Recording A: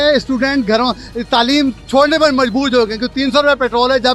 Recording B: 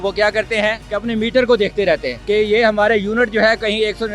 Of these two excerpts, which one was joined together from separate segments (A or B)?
B